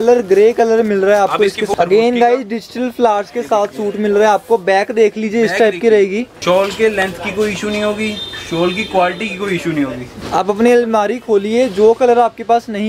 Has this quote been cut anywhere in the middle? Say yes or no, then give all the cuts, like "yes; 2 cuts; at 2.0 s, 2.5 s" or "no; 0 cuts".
yes; 3 cuts; at 1.7 s, 6.3 s, 10.1 s